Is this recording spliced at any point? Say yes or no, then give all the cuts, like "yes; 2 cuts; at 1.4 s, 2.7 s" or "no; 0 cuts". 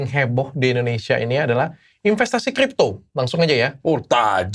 no; 0 cuts